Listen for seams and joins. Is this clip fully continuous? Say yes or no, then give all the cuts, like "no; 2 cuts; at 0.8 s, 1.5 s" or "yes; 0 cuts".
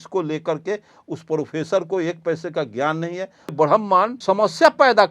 no; 2 cuts; at 3.5 s, 4.2 s